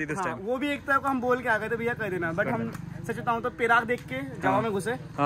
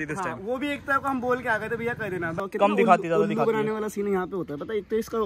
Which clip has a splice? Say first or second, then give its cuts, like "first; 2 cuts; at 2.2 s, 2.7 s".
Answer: second; 1 cut; at 2.4 s